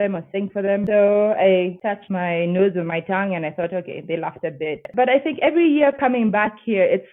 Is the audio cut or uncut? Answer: cut